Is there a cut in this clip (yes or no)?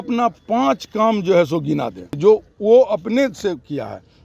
yes